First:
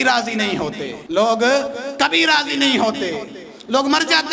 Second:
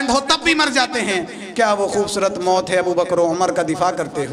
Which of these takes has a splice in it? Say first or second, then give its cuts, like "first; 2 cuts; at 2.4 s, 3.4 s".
first; 1 cut; at 0.9 s